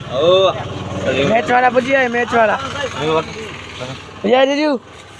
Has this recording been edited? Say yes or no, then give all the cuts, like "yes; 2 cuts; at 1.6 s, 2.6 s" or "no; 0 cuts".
no; 0 cuts